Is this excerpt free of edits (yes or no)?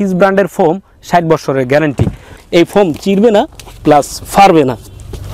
no